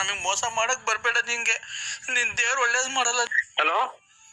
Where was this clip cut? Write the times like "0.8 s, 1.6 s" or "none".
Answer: 3.4 s